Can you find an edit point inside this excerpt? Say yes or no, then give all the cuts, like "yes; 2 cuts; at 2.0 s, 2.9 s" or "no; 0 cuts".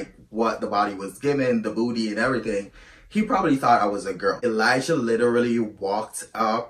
yes; 1 cut; at 4.4 s